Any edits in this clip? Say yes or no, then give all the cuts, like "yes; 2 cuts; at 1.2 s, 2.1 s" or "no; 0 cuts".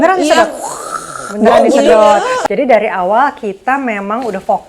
yes; 1 cut; at 2.4 s